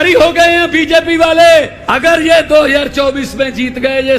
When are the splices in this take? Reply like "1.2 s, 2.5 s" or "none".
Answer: 1.8 s